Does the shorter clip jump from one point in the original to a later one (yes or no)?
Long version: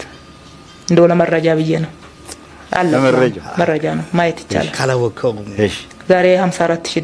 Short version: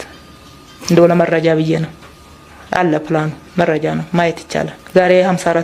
yes